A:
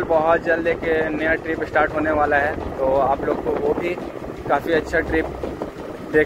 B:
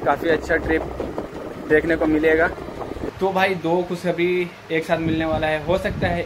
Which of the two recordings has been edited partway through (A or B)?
B